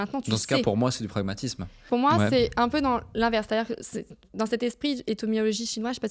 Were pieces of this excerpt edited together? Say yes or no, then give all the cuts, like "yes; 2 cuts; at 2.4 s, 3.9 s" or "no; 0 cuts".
yes; 1 cut; at 1.9 s